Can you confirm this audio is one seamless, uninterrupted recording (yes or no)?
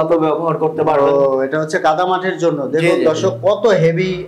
yes